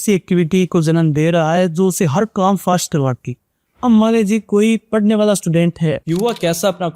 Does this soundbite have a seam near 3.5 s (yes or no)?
no